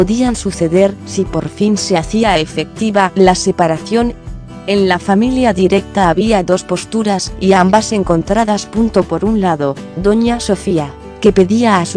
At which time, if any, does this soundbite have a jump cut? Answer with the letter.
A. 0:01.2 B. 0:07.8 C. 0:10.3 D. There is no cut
C